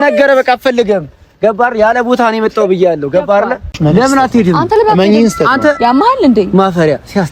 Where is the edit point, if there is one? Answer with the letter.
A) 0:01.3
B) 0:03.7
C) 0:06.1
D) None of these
B